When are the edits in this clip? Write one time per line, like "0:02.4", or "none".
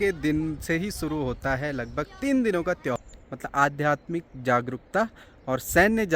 0:03.0